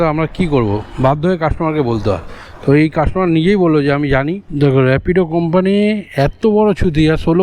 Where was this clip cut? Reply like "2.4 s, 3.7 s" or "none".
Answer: 4.4 s

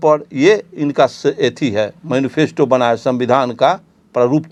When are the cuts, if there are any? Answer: none

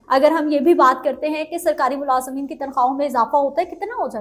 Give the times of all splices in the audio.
none

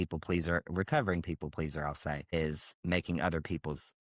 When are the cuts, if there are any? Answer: 2.3 s

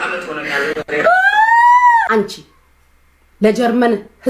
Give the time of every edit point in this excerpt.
2.1 s

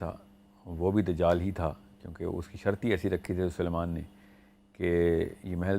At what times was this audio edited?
none

